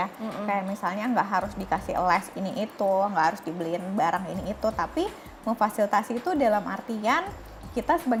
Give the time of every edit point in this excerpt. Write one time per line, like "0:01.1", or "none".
none